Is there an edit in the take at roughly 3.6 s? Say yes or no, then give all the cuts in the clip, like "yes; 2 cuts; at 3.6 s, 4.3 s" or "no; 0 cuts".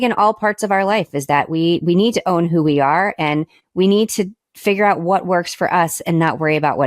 yes; 1 cut; at 3.6 s